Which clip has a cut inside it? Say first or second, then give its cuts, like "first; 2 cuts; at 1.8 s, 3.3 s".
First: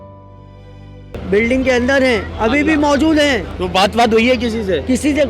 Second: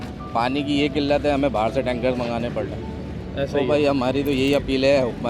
first; 1 cut; at 1.1 s